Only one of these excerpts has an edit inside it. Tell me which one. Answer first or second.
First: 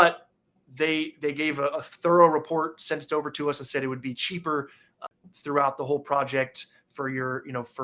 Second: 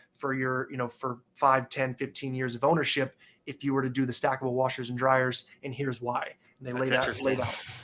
first